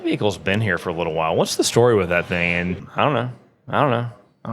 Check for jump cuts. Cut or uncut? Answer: cut